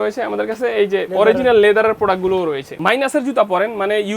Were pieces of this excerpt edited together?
yes; 2 cuts; at 1.1 s, 2.8 s

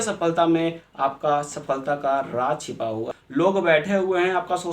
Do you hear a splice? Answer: yes; 1 cut; at 3.2 s

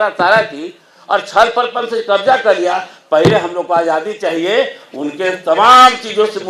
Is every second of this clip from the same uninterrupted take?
yes; 0 cuts

